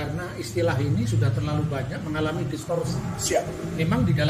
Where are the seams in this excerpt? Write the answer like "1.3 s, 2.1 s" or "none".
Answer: none